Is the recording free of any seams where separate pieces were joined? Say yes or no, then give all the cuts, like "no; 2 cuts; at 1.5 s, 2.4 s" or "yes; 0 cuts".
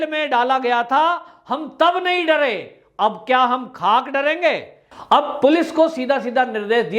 no; 1 cut; at 4.9 s